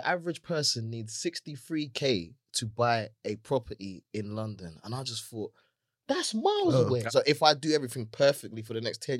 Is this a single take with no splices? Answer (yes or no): no